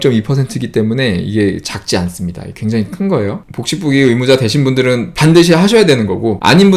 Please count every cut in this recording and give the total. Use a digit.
1